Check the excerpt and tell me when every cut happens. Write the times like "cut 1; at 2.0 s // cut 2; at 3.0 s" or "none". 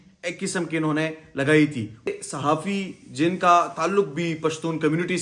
cut 1; at 2.1 s